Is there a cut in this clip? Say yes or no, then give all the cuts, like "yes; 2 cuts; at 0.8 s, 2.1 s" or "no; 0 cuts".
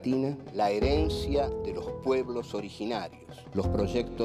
no; 0 cuts